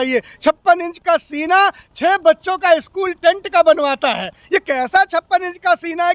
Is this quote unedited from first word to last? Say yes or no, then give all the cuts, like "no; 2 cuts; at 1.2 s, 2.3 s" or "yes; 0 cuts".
yes; 0 cuts